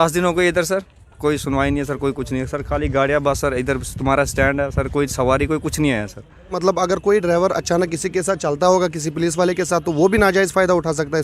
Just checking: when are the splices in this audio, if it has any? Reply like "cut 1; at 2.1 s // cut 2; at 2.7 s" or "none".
cut 1; at 6.5 s